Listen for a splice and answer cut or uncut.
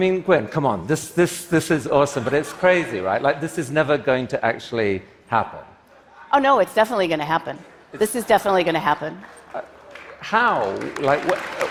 uncut